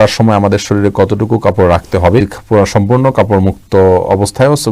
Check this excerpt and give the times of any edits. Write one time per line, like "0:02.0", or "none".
none